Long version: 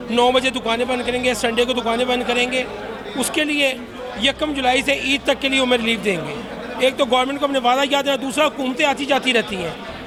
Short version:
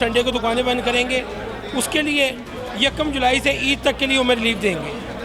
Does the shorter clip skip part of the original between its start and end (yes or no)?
no